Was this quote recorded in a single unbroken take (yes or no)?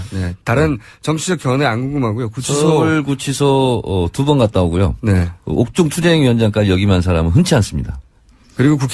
yes